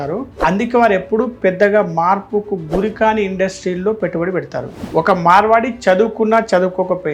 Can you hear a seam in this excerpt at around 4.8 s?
yes; 1 cut; at 4.8 s

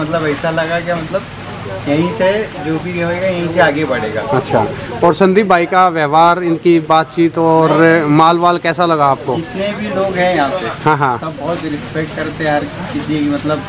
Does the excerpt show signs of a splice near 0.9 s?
no; 0 cuts

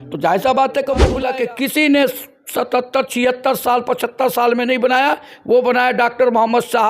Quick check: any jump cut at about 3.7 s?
no; 1 cut; at 1.1 s

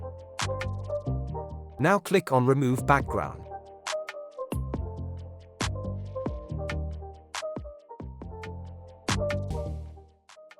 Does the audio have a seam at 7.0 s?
no; 3 cuts; at 1.2 s, 3.0 s, 9.5 s

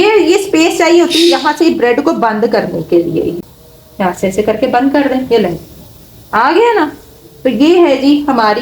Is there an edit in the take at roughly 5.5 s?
no; 1 cut; at 3.4 s

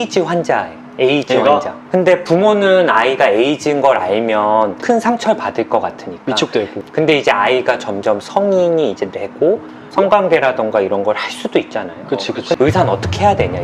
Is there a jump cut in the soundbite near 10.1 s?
no; 3 cuts; at 1.8 s, 6.8 s, 12.6 s

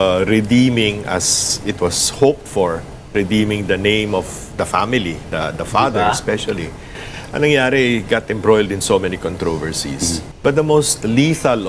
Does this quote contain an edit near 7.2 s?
no; 1 cut; at 10.3 s

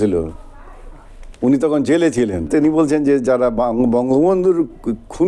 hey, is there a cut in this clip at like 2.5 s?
yes; 1 cut; at 2.5 s

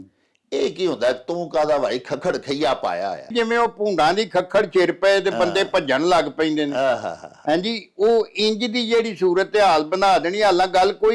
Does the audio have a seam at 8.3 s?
no; 1 cut; at 3.3 s

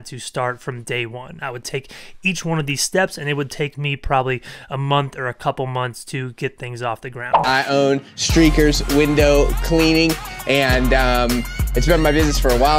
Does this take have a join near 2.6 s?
no; 1 cut; at 7.2 s

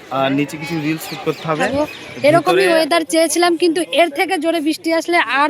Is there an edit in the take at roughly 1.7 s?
yes; 1 cut; at 1.7 s

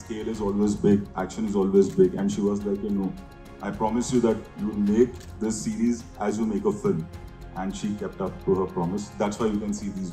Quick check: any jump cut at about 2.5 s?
no; 0 cuts

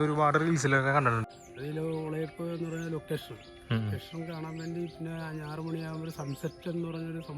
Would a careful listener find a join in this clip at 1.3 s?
yes; 1 cut; at 1.3 s

